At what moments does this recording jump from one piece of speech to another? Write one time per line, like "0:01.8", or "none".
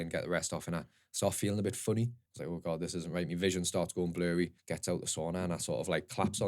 0:02.3
0:04.7